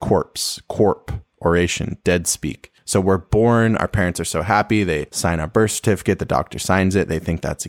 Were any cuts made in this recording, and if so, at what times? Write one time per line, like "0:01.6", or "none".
0:02.7
0:05.1